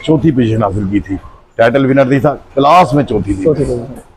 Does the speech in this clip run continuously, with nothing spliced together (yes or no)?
yes